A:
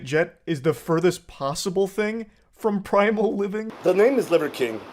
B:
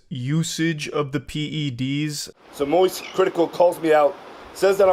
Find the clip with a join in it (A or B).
A